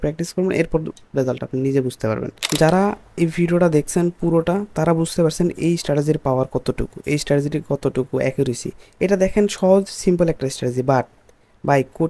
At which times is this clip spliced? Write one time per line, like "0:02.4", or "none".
0:02.4